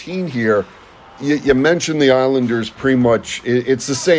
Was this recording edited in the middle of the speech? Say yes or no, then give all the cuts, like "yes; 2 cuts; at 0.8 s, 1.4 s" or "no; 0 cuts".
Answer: no; 0 cuts